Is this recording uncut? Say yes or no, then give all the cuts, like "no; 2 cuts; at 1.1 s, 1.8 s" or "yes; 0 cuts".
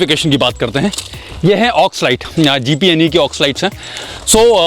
yes; 0 cuts